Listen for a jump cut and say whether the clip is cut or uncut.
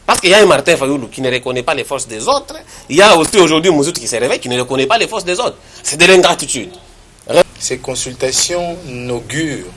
cut